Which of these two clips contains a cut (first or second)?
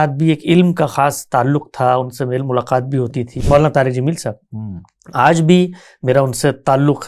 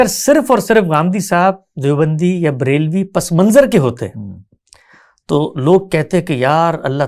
first